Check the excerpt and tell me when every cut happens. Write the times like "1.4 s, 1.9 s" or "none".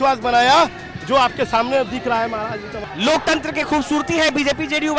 2.8 s